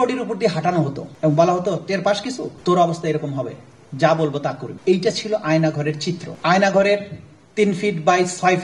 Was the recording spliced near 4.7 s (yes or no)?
yes